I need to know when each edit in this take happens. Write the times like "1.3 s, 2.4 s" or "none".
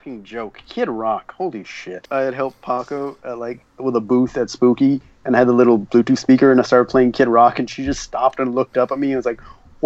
2.0 s